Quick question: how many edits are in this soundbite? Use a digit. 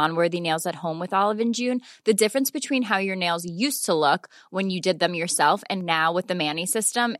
0